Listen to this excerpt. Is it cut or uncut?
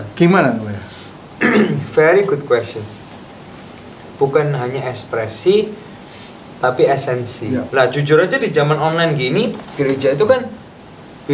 cut